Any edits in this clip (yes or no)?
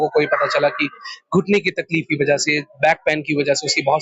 no